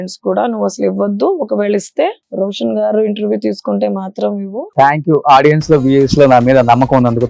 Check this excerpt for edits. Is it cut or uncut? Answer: cut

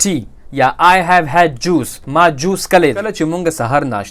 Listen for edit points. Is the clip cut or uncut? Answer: cut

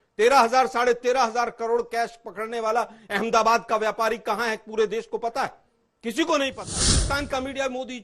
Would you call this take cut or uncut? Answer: cut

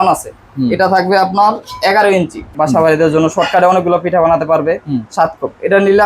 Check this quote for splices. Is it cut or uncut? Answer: cut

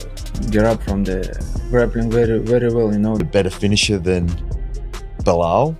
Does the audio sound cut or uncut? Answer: cut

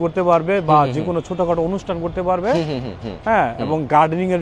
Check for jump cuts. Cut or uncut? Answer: uncut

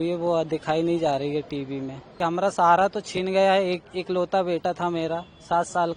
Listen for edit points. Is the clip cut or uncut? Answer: cut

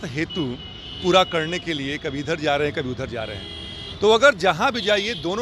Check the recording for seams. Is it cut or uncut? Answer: uncut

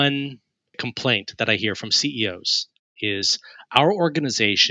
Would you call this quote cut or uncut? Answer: cut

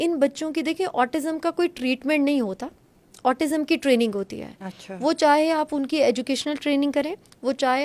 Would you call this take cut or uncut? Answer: uncut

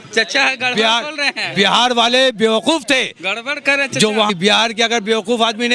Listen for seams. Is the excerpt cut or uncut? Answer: cut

